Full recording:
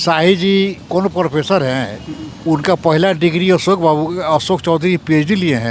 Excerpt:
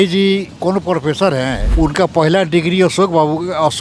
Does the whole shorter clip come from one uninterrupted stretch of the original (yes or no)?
no